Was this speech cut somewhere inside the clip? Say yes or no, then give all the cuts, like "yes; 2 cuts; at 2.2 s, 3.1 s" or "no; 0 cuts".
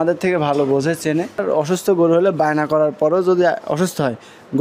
yes; 1 cut; at 1.4 s